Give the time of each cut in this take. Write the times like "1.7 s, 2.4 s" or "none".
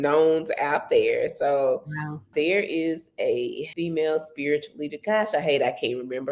2.3 s, 3.6 s